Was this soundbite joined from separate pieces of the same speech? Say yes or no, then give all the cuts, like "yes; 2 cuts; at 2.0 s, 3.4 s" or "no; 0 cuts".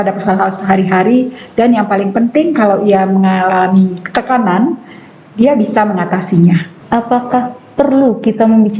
yes; 1 cut; at 6.7 s